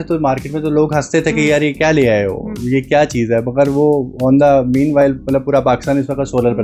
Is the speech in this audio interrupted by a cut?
no; 0 cuts

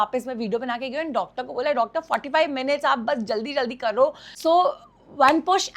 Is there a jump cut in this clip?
yes; 1 cut; at 4.3 s

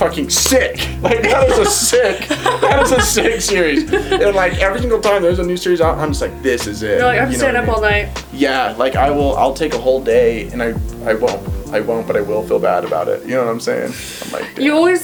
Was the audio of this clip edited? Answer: no; 0 cuts

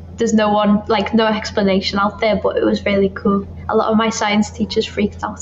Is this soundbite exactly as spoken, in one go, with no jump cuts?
no; 1 cut; at 3.6 s

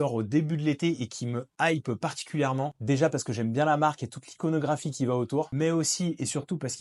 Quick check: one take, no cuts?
yes; 0 cuts

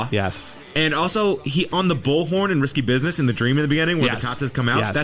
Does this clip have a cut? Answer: no; 0 cuts

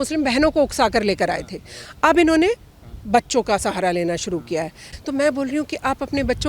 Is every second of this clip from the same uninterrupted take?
no; 1 cut; at 4.8 s

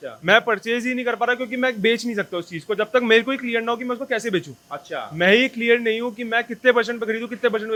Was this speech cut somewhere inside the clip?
no; 0 cuts

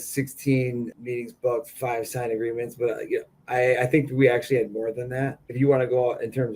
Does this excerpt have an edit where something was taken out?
yes; 3 cuts; at 1.0 s, 1.7 s, 5.5 s

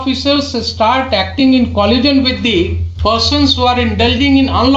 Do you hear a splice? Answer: yes; 1 cut; at 2.8 s

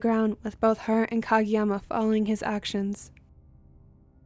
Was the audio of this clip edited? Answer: yes; 1 cut; at 3.0 s

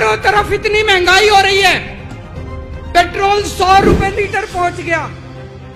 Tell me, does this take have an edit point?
no; 0 cuts

